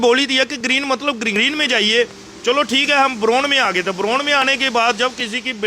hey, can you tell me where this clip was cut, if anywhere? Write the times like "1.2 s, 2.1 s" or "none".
1.3 s